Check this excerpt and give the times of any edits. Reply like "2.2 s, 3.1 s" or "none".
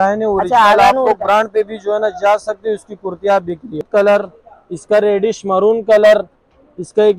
3.9 s